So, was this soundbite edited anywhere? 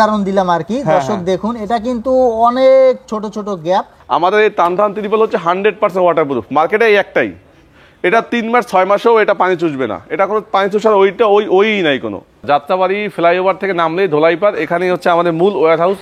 yes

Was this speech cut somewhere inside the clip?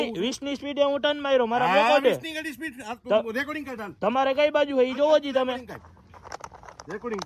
no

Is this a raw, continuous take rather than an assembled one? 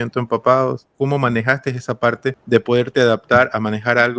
no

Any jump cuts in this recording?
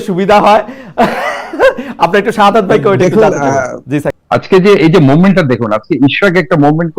yes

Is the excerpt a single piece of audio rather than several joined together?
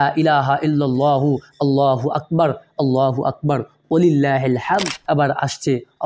no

